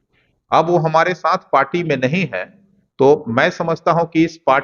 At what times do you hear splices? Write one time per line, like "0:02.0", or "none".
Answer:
none